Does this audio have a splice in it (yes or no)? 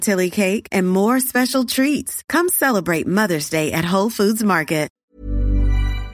yes